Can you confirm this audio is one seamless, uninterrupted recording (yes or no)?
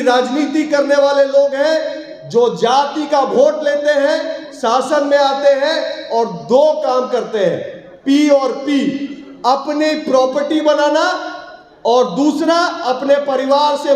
yes